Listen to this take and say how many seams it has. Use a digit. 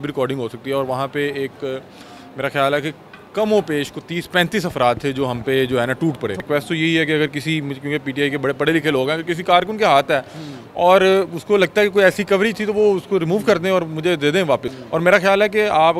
2